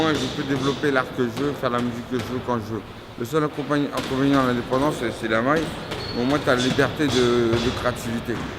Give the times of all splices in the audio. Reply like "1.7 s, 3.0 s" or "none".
7.3 s